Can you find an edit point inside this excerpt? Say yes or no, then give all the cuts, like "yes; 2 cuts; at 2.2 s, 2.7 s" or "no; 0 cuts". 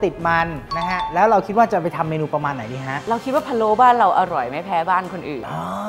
yes; 1 cut; at 2.9 s